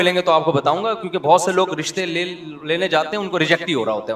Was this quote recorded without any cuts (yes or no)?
yes